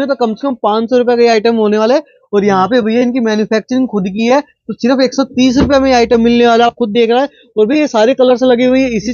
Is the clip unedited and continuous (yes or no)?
yes